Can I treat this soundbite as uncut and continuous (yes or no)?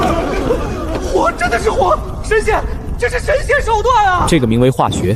no